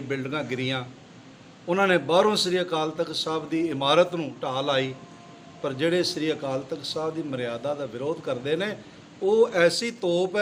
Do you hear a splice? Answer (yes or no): no